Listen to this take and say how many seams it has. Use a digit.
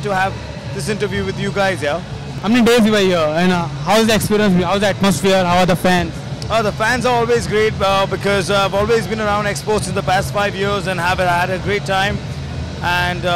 1